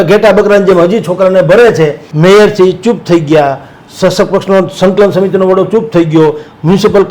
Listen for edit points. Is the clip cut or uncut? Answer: cut